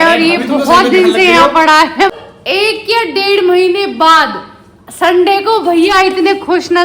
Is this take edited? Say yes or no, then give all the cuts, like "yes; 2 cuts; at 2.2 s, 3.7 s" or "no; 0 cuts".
yes; 1 cut; at 2.1 s